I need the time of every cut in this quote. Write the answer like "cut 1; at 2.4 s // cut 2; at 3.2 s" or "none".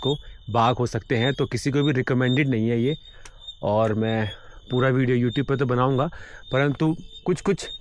none

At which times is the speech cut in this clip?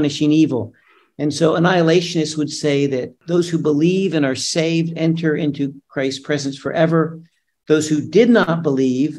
cut 1; at 3.2 s

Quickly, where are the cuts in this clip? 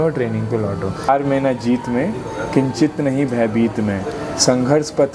cut 1; at 1.1 s

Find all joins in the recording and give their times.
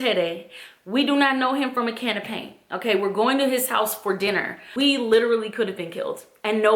cut 1; at 4.6 s

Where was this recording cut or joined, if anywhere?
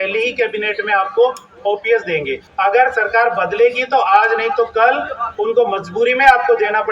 cut 1; at 2.4 s

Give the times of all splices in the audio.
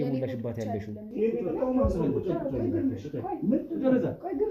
cut 1; at 1.0 s

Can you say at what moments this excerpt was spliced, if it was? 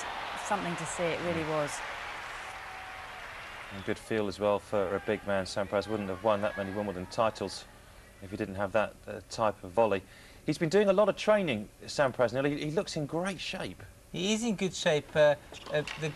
cut 1; at 6.1 s

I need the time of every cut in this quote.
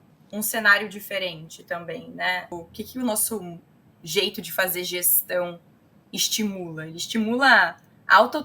cut 1; at 2.6 s

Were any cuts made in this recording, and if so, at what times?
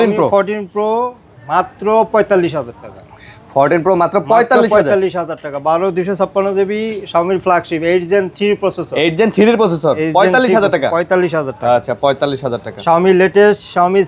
none

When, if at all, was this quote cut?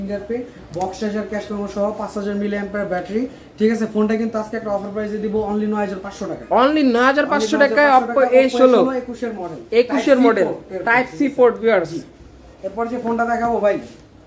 none

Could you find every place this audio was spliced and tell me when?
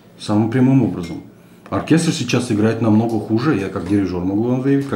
none

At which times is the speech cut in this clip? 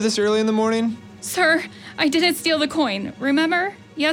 cut 1; at 1.1 s

